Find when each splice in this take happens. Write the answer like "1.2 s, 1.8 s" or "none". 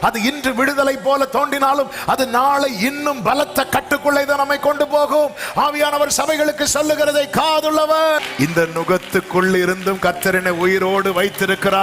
8.2 s